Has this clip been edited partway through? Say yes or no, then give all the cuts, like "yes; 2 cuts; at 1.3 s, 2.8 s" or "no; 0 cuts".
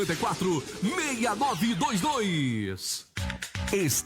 yes; 1 cut; at 3.0 s